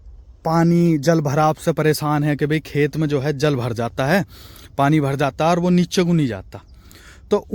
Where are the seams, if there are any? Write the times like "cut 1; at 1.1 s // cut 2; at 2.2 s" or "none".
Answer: none